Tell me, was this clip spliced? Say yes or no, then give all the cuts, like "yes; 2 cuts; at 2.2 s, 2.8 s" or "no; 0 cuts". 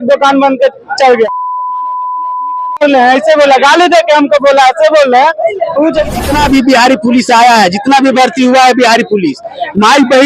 yes; 1 cut; at 6.2 s